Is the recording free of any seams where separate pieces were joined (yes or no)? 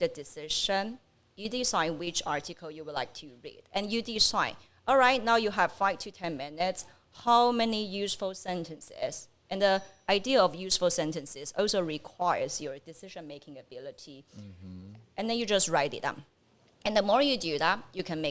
yes